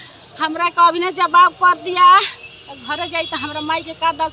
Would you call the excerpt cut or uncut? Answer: uncut